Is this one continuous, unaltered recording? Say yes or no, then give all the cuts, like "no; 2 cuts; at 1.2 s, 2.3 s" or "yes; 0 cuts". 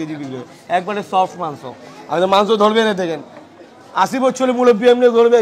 yes; 0 cuts